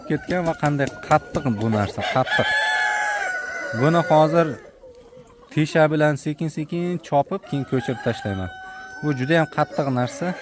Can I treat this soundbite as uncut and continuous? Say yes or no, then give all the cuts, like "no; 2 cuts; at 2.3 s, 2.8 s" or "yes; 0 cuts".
yes; 0 cuts